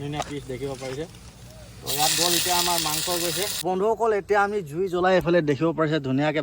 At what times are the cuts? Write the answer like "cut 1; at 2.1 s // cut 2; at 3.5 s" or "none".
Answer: cut 1; at 3.5 s